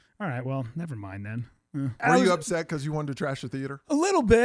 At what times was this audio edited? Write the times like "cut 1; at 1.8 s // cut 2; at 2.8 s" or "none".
cut 1; at 2.0 s